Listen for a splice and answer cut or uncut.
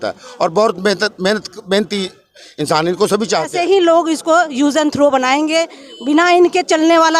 cut